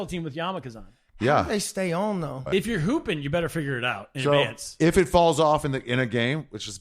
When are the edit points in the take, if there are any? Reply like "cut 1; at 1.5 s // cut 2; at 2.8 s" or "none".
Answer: cut 1; at 2.4 s